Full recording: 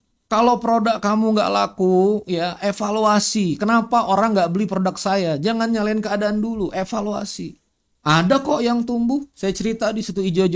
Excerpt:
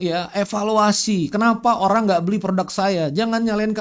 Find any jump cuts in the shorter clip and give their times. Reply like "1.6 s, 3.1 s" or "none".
none